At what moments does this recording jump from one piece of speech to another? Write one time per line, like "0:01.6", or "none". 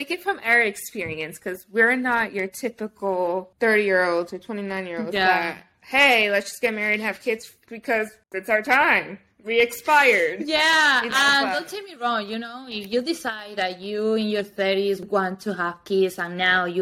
0:03.5